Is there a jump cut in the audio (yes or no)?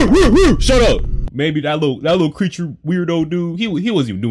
yes